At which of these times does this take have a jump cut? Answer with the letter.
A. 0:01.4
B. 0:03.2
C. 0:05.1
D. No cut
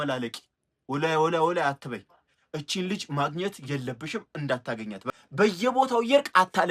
C